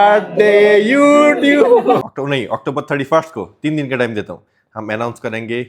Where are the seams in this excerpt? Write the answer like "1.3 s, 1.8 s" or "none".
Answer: 2.0 s

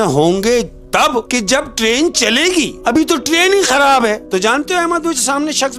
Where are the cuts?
1.3 s, 2.7 s, 4.2 s

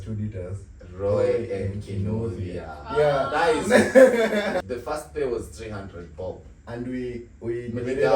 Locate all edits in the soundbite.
4.6 s

